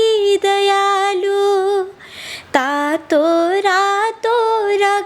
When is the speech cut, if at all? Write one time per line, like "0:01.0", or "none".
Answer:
none